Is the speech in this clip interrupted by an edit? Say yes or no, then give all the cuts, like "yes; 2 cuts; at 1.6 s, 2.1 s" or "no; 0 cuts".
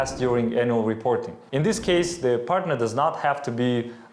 yes; 1 cut; at 1.4 s